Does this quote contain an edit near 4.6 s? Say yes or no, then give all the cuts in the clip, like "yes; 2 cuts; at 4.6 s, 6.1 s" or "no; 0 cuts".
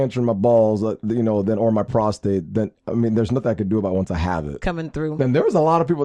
yes; 1 cut; at 4.6 s